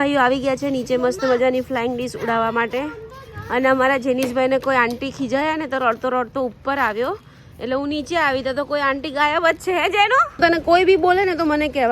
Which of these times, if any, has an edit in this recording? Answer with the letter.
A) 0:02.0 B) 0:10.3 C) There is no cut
B